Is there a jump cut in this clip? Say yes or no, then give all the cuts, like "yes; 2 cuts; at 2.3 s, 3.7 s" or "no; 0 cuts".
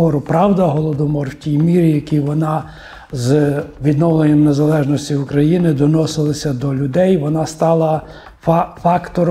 no; 0 cuts